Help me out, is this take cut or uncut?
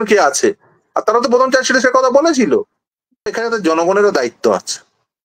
cut